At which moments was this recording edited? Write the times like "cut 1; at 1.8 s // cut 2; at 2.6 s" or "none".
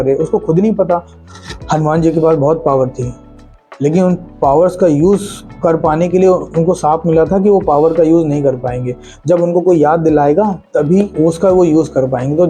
cut 1; at 1.1 s // cut 2; at 6.5 s // cut 3; at 11.1 s